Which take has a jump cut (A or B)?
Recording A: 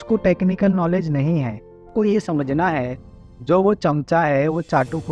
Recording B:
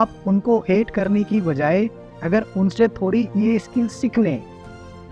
A